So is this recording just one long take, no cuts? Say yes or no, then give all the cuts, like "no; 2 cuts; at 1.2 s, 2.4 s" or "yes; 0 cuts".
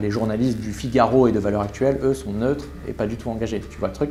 yes; 0 cuts